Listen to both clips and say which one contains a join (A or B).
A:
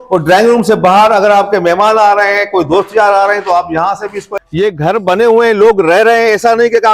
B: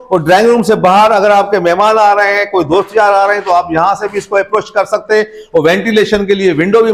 A